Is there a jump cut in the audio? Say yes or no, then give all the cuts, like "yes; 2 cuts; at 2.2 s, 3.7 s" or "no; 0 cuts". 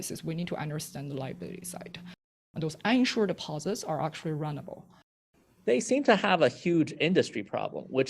yes; 2 cuts; at 2.4 s, 5.1 s